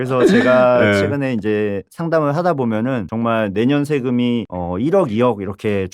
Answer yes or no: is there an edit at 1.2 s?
no